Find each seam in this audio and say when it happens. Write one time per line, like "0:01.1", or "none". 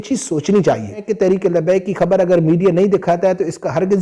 0:01.0